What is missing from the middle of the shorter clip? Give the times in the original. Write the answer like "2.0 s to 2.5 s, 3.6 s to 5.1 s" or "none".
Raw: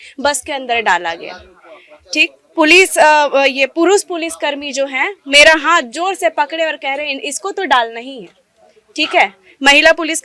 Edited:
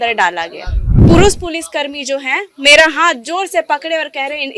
1.7 s to 3.7 s